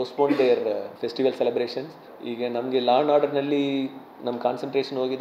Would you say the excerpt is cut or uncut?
cut